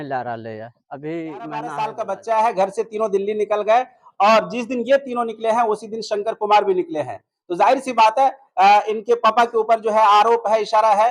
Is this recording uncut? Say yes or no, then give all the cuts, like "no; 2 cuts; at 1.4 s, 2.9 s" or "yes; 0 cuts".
no; 1 cut; at 1.7 s